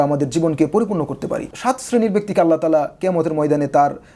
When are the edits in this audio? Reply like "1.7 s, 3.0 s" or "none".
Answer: 1.5 s